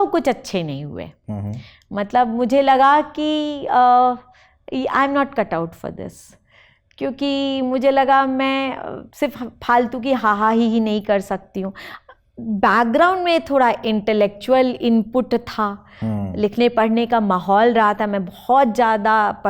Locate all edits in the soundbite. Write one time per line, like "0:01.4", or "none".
none